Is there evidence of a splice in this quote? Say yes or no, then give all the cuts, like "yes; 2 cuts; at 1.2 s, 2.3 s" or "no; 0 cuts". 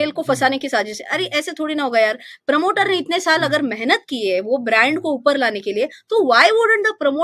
no; 0 cuts